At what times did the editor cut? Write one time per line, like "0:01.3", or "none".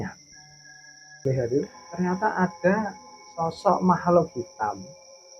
0:01.2